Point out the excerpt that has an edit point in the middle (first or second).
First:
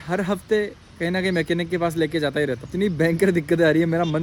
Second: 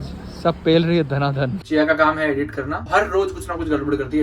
second